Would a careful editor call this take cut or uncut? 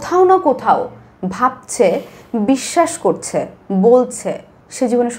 uncut